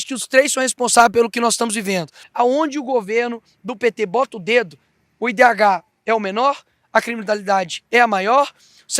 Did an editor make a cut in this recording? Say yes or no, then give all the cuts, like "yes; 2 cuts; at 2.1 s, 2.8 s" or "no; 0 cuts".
yes; 1 cut; at 2.2 s